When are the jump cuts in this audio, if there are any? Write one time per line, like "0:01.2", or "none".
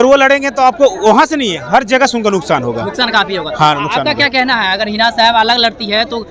none